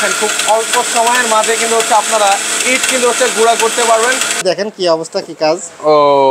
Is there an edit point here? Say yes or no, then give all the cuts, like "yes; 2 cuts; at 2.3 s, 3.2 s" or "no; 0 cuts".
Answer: yes; 1 cut; at 4.4 s